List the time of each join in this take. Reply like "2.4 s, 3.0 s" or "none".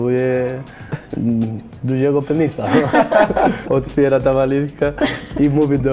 3.6 s

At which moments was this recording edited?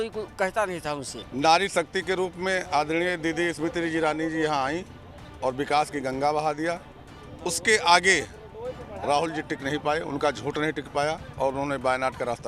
1.2 s

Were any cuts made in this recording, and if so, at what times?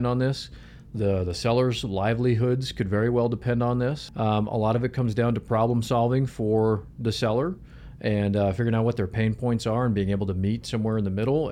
4.1 s

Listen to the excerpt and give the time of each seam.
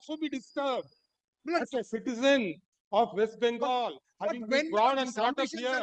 none

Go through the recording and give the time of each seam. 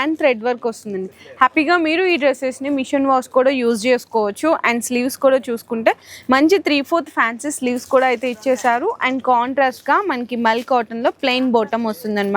none

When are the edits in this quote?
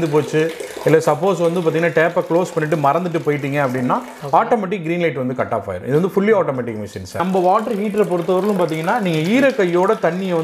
7.2 s

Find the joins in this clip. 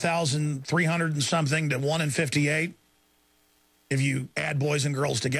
4.3 s

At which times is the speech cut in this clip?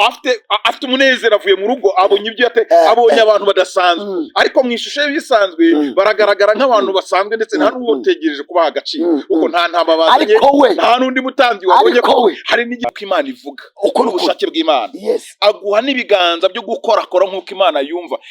12.8 s

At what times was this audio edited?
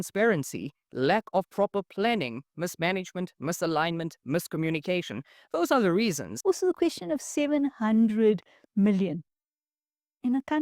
6.3 s

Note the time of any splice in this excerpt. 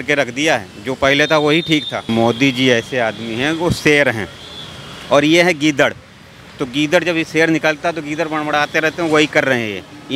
2.1 s

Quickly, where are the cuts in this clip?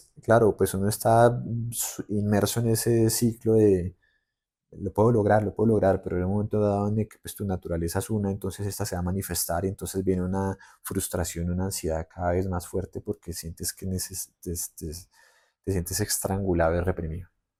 none

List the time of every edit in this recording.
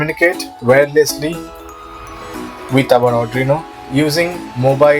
3.8 s

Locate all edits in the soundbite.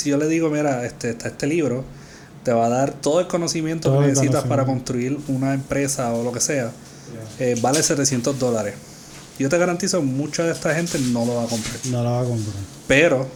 none

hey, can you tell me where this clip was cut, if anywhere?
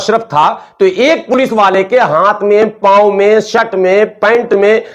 none

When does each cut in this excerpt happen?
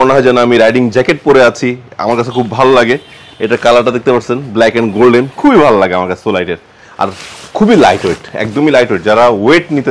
none

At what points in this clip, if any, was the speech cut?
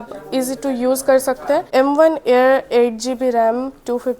1.7 s

